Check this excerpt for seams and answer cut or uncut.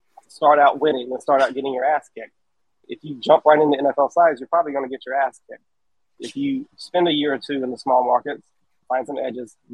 cut